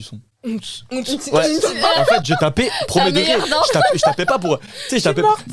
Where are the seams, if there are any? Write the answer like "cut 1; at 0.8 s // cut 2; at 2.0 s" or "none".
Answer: none